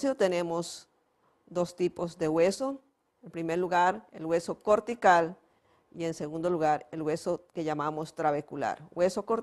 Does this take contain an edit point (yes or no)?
no